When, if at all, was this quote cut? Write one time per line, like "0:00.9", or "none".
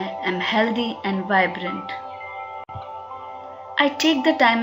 0:02.7